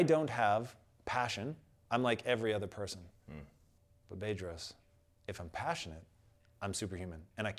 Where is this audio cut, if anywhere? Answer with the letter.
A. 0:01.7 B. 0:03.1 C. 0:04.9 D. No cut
D